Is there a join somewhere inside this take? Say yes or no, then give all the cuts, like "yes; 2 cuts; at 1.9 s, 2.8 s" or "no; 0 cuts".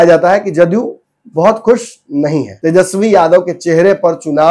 yes; 1 cut; at 2.5 s